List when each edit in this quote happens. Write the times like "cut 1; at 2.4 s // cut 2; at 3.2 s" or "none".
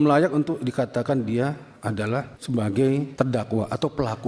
cut 1; at 2.4 s // cut 2; at 3.1 s